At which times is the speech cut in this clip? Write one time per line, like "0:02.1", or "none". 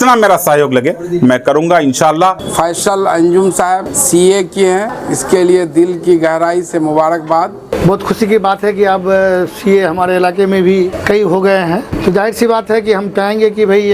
0:02.4
0:03.9
0:05.0
0:07.7
0:11.0
0:11.9